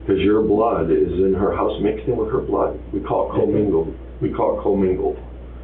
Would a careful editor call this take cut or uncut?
uncut